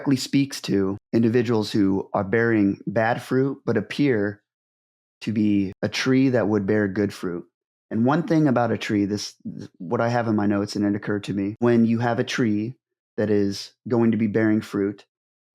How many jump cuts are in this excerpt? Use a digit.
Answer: 2